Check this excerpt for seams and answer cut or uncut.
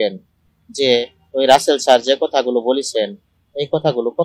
uncut